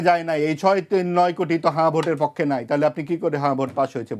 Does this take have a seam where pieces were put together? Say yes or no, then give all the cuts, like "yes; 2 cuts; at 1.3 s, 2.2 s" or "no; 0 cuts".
no; 0 cuts